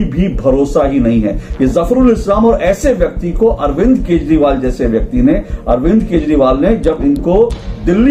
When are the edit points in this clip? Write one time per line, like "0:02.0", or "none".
none